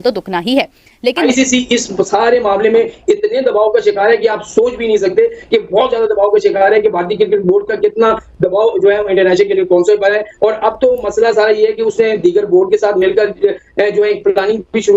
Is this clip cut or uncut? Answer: cut